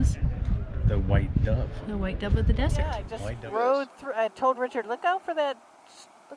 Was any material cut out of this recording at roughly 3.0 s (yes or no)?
yes